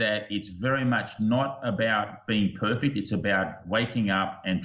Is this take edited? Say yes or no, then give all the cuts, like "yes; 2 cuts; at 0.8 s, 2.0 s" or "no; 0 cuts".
no; 0 cuts